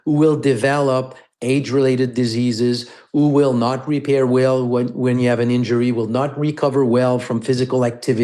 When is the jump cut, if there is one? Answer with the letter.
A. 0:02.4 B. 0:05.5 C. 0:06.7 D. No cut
D